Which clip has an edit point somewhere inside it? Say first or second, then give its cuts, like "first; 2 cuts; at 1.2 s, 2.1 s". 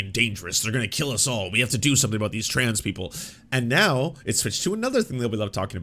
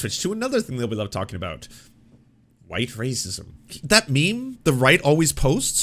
second; 1 cut; at 3.8 s